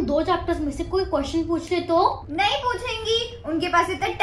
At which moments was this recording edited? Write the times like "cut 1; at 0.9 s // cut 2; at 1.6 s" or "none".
none